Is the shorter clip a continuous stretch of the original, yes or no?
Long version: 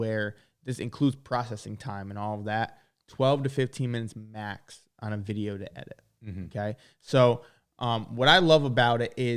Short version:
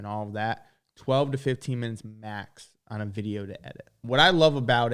no